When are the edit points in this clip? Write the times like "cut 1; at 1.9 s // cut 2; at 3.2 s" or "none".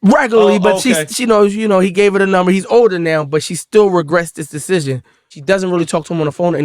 cut 1; at 5.3 s